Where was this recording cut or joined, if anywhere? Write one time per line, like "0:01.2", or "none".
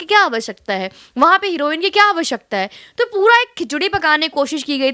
none